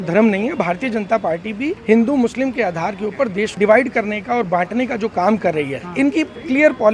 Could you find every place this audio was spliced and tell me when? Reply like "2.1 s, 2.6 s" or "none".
1.8 s, 3.6 s, 5.8 s